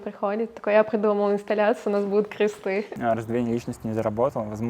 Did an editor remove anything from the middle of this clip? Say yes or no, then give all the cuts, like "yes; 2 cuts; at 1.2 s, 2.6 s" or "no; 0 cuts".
yes; 1 cut; at 2.9 s